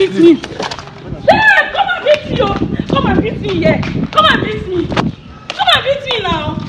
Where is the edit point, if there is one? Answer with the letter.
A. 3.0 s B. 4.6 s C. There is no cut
C